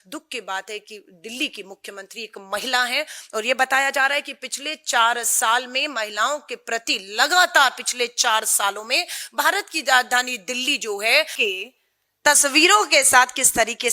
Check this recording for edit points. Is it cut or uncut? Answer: cut